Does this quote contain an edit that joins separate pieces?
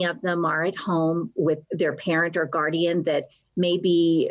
yes; 1 cut; at 1.7 s

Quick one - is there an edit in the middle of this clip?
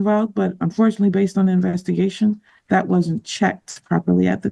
no; 0 cuts

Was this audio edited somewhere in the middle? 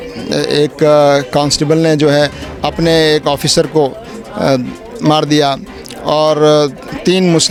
no; 0 cuts

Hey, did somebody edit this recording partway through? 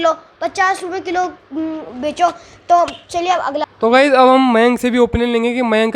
no; 0 cuts

